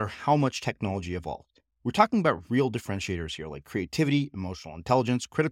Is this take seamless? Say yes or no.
yes